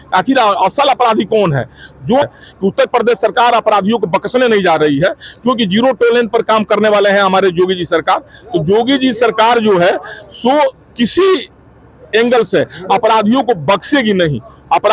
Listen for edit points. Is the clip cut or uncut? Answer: cut